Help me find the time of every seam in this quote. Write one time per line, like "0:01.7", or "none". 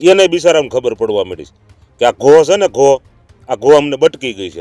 none